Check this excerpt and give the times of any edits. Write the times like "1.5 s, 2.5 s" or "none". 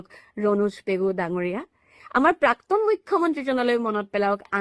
none